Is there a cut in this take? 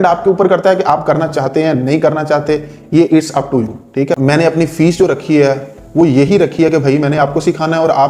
yes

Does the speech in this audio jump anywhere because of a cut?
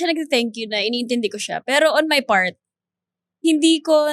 no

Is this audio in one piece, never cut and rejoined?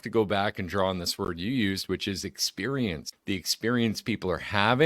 no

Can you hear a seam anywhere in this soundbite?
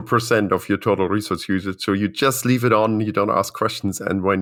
no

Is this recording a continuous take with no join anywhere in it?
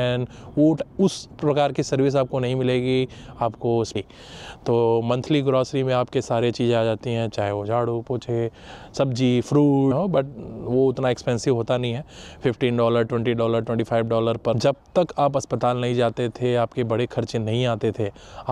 no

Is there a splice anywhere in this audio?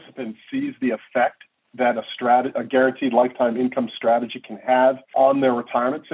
no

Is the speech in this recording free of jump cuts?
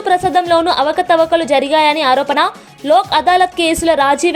yes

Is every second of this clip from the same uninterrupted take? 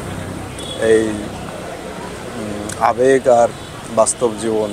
yes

